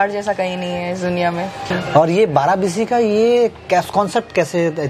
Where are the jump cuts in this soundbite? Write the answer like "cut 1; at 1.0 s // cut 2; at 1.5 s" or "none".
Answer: cut 1; at 1.7 s